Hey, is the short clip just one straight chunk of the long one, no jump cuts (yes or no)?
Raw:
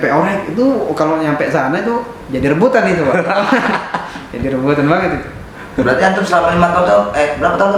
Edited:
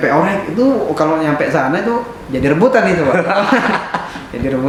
yes